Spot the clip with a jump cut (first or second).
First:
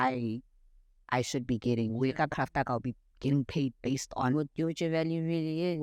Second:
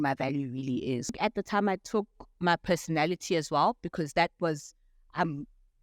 second